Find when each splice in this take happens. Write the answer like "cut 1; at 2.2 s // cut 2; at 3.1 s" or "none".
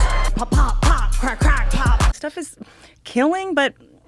cut 1; at 2.1 s